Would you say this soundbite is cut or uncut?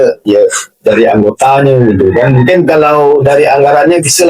uncut